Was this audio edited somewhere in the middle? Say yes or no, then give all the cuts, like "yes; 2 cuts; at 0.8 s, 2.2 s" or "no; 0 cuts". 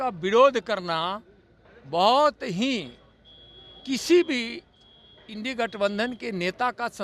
no; 0 cuts